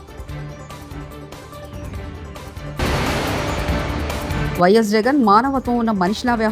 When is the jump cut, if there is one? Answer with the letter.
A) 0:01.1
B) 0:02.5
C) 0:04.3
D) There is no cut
A